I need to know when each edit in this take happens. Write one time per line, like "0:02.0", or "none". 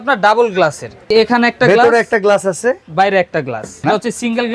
0:01.1
0:03.8